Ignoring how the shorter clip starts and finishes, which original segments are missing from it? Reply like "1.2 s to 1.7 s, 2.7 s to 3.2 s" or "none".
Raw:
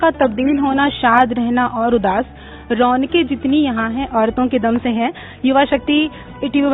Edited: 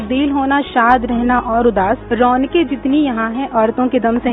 2.3 s to 2.7 s